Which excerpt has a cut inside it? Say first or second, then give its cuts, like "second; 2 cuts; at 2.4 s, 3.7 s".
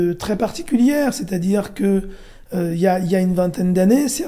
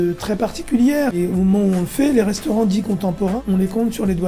second; 2 cuts; at 1.2 s, 3.4 s